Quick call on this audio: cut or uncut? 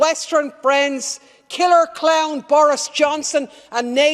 uncut